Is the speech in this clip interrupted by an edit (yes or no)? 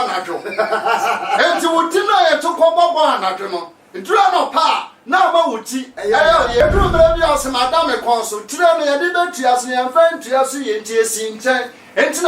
yes